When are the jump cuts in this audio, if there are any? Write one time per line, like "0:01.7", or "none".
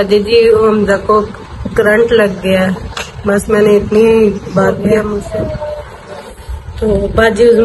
0:04.9